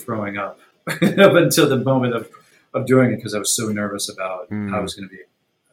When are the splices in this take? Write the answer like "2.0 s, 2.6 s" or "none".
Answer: none